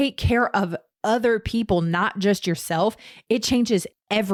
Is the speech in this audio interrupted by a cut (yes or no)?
no